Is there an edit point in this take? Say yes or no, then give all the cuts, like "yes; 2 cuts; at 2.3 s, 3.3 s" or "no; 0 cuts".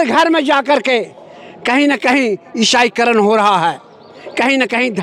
no; 0 cuts